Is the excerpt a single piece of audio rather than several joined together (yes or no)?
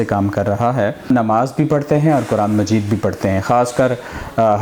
no